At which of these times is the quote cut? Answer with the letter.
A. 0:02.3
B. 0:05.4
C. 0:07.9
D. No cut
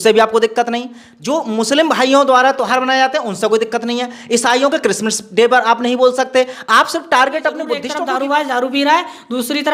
C